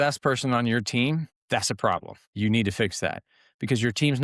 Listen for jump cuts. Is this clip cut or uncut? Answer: cut